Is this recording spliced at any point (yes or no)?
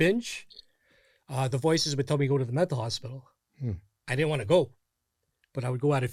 no